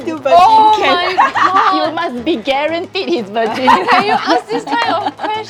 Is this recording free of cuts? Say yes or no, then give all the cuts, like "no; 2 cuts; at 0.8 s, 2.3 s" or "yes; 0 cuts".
yes; 0 cuts